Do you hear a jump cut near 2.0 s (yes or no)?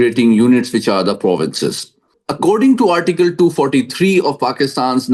yes